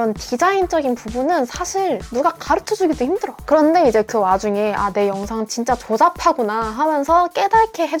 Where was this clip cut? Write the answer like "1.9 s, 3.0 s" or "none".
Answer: none